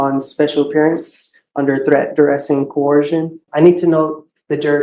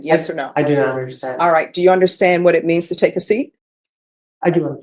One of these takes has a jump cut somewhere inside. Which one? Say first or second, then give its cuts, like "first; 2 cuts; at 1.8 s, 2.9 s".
first; 1 cut; at 3.4 s